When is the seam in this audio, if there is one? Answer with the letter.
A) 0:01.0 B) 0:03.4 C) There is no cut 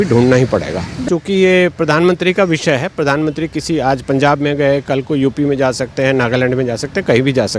A